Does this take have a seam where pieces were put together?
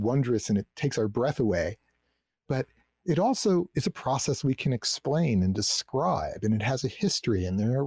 no; 0 cuts

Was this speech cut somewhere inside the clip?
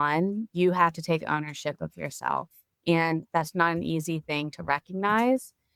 no; 0 cuts

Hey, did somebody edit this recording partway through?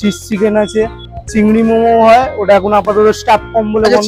no; 0 cuts

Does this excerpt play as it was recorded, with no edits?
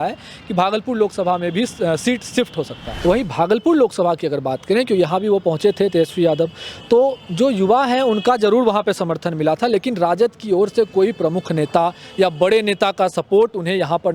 no; 1 cut; at 2.8 s

